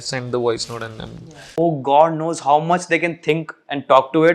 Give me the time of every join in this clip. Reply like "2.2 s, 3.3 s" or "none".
1.6 s